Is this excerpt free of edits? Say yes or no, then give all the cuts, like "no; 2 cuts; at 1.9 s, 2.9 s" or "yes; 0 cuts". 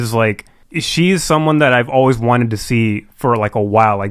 yes; 0 cuts